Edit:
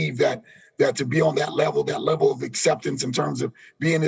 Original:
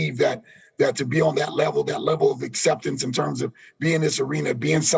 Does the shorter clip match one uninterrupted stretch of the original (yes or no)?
yes